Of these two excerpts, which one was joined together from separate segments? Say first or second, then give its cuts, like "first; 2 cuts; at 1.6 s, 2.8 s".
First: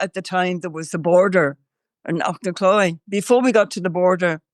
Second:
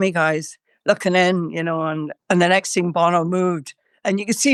first; 1 cut; at 3.0 s